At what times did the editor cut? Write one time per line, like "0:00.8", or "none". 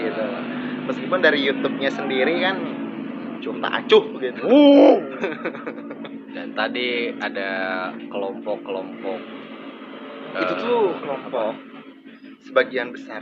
none